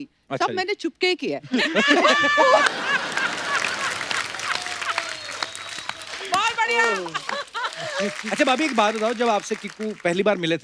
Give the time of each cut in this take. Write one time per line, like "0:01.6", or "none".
0:08.2